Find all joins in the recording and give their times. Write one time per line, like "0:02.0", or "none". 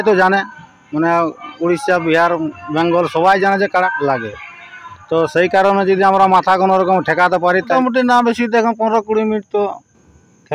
0:03.9
0:07.7